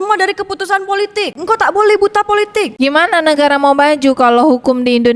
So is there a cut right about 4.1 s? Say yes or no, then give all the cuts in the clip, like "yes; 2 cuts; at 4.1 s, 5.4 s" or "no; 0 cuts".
no; 2 cuts; at 1.4 s, 2.7 s